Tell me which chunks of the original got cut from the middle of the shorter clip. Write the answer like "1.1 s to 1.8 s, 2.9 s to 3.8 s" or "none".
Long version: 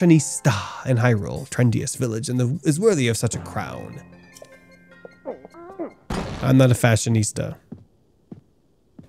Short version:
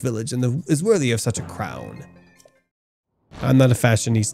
5.3 s to 6.3 s